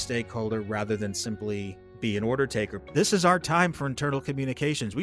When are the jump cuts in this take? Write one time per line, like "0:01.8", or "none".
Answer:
0:01.8
0:02.8

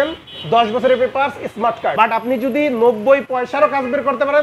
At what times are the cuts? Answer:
0:01.9

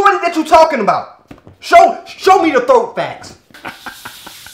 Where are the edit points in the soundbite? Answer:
0:03.6

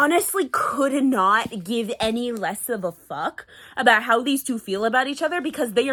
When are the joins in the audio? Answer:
none

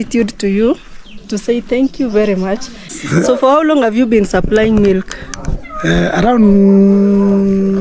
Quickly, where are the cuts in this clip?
0:03.0

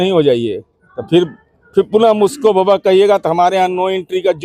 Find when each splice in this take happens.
none

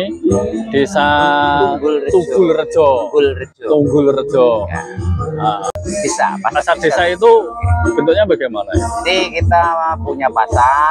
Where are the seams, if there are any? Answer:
0:05.8

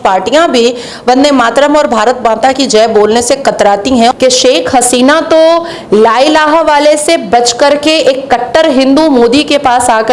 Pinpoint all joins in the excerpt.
0:04.1

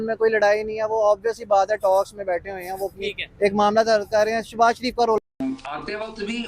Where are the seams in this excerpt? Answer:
0:05.2

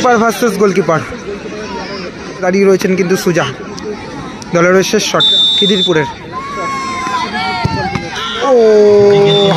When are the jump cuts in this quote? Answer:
0:02.4

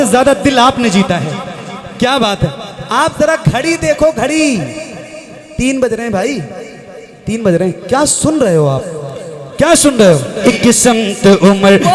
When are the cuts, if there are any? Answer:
0:10.4

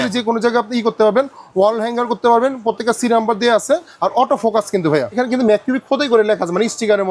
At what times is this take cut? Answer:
0:05.1

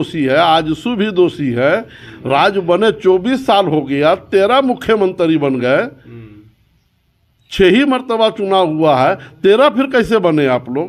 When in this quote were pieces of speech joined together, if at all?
none

